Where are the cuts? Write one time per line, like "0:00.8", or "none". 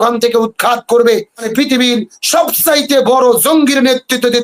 0:01.5

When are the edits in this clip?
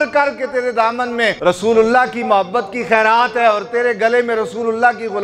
0:01.4

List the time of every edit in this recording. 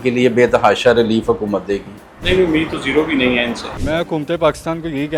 0:03.8

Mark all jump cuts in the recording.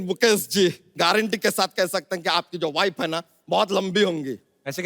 0:00.9

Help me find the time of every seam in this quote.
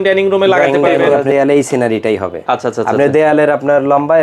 0:01.2

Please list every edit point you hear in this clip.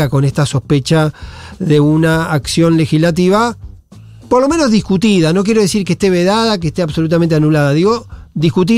none

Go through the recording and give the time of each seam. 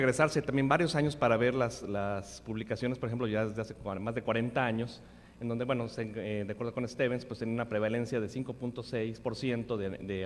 0:03.1

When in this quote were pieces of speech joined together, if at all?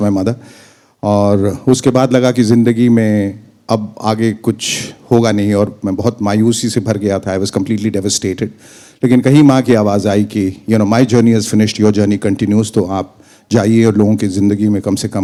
none

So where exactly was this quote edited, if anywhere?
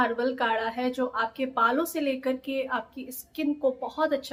none

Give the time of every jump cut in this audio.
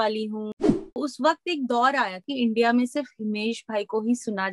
0:00.9
0:02.2

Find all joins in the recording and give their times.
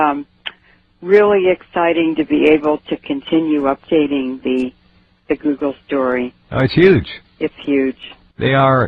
0:06.0

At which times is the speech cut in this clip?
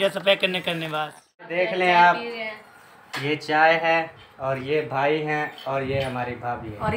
0:01.5

